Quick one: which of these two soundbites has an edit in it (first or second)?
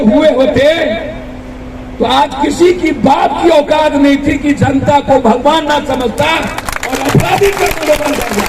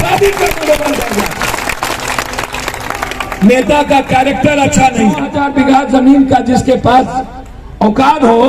second